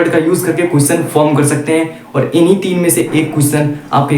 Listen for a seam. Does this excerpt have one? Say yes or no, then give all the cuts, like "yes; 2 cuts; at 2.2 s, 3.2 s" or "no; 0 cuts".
no; 0 cuts